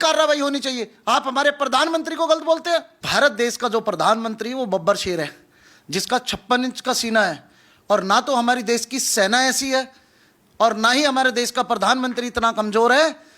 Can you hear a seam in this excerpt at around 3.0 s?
yes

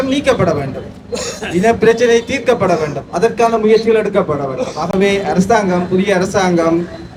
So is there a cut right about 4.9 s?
no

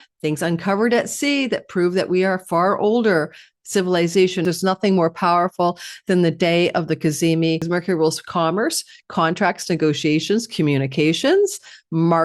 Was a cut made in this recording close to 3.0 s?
no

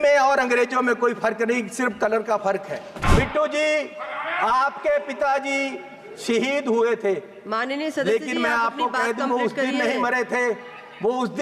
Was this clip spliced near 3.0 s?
yes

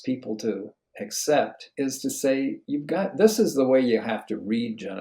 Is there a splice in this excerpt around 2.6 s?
yes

